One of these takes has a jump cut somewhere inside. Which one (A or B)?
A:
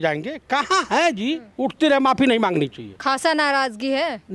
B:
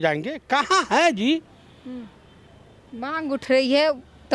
A